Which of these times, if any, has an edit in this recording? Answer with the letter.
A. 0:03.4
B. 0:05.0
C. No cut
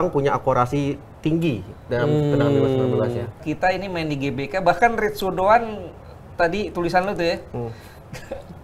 A